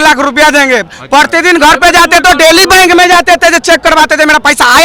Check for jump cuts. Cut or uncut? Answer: uncut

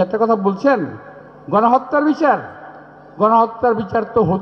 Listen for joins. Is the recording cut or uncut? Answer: uncut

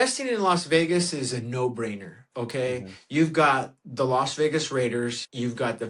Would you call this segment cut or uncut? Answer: uncut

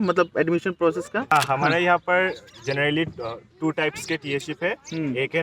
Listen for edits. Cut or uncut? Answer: cut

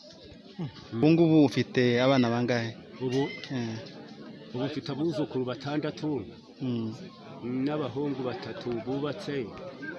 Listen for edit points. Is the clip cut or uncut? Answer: cut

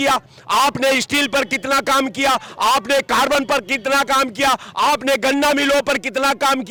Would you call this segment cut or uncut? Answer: uncut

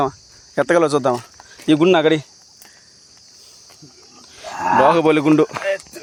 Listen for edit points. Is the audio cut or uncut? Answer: uncut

